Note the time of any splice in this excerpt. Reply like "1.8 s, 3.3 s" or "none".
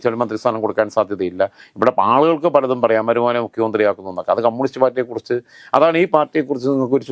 none